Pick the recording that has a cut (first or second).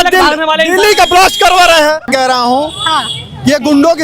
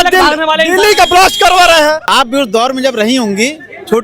second